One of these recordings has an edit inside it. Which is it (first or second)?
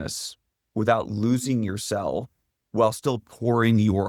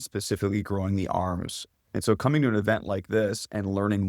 second